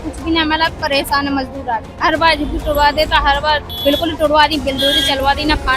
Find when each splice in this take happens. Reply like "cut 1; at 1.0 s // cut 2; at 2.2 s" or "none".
cut 1; at 1.9 s // cut 2; at 3.7 s

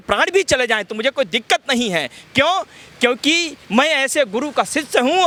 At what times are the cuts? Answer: none

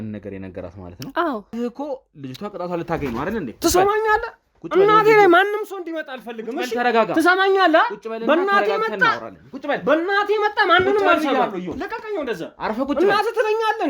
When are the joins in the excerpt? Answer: cut 1; at 1.5 s

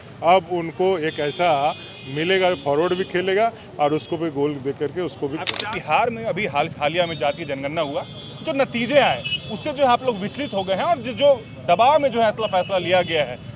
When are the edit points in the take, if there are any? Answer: cut 1; at 5.5 s

